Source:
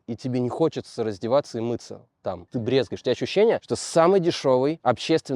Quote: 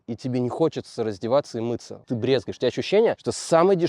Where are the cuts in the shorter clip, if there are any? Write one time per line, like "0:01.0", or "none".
0:02.0